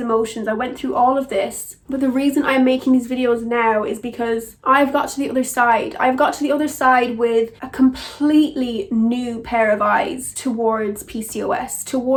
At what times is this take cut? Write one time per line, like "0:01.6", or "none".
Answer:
none